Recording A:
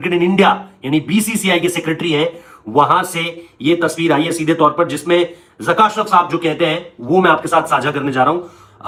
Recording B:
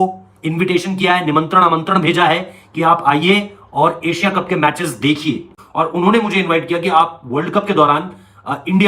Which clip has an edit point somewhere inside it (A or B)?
B